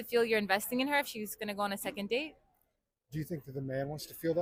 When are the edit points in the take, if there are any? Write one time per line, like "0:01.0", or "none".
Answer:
none

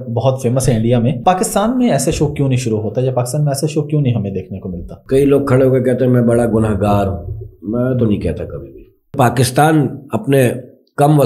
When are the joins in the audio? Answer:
0:01.2
0:04.9
0:09.1

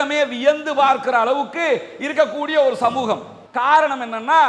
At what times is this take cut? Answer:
0:03.5

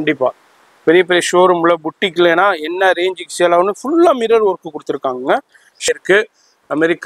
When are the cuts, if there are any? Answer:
0:05.8

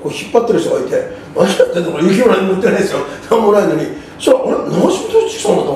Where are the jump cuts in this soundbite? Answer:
none

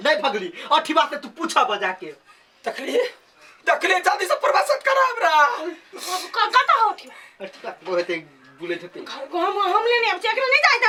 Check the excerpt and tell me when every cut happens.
none

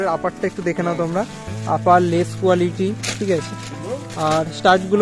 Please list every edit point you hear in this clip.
none

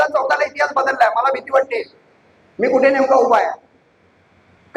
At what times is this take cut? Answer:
none

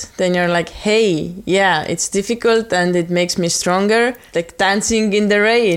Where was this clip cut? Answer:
0:04.2

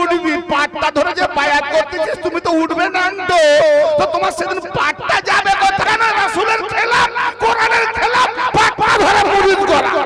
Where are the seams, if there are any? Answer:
0:05.8

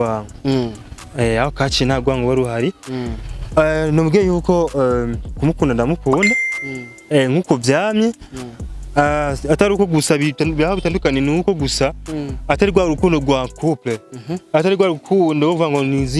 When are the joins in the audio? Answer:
none

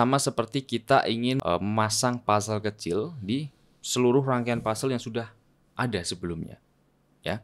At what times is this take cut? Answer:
0:01.4

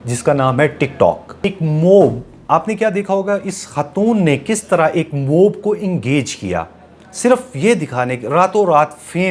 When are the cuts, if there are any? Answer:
0:01.5

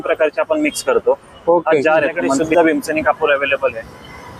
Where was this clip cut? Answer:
0:02.4

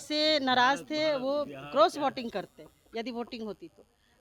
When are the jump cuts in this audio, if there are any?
none

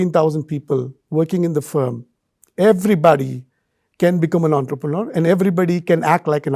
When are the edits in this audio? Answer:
none

